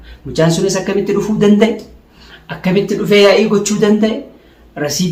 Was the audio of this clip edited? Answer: no; 0 cuts

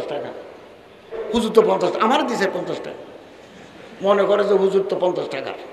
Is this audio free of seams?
no; 1 cut; at 1.2 s

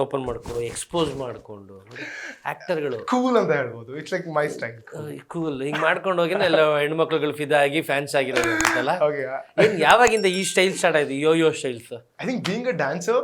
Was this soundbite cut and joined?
no; 0 cuts

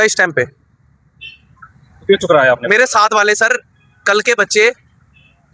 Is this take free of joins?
yes; 0 cuts

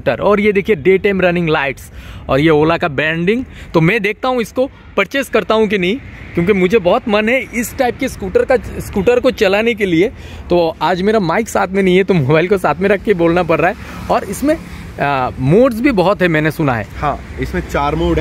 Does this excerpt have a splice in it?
no; 0 cuts

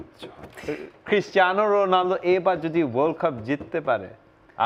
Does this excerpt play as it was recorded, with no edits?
yes; 0 cuts

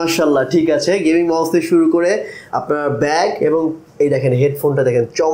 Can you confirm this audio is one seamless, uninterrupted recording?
yes; 0 cuts

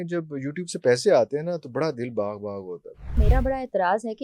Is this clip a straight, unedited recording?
no; 1 cut; at 3.2 s

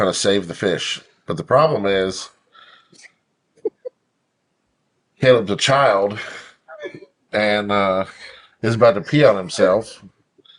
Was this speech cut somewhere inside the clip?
no; 0 cuts

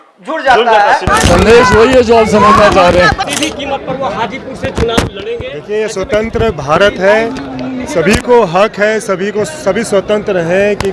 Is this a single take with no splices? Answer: no; 2 cuts; at 1.0 s, 3.2 s

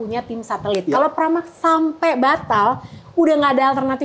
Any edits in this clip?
no; 0 cuts

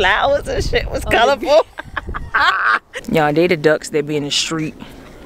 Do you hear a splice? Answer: yes; 1 cut; at 2.9 s

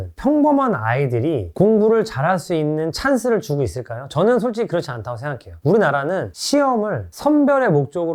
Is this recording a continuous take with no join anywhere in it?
yes; 0 cuts

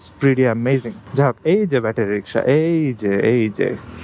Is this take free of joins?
no; 1 cut; at 1.0 s

